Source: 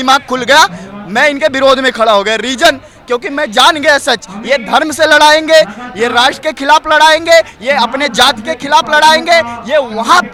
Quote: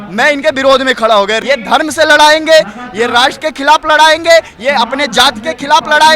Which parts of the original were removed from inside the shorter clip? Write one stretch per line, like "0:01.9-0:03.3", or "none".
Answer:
0:02.3-0:04.4